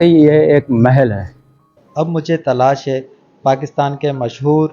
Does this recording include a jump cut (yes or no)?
yes